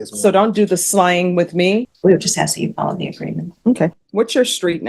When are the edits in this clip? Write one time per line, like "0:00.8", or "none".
0:01.9